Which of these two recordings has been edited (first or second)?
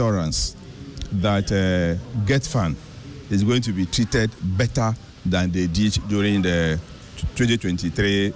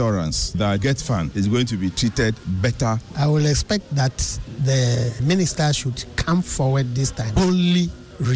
second